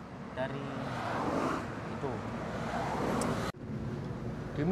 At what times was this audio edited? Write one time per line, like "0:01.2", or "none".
0:03.5